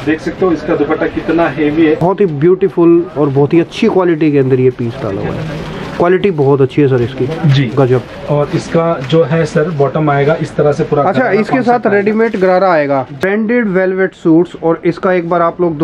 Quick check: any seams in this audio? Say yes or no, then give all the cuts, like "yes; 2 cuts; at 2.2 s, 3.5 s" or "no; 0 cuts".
yes; 2 cuts; at 2.0 s, 13.2 s